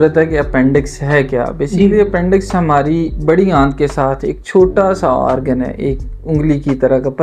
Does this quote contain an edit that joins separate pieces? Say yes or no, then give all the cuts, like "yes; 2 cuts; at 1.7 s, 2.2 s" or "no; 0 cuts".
no; 0 cuts